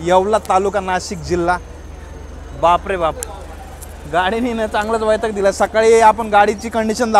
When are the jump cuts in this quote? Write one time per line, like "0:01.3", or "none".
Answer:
none